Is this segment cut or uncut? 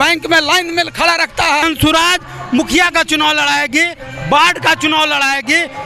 cut